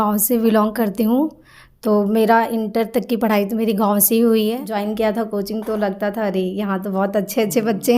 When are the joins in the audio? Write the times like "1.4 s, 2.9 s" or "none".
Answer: 4.6 s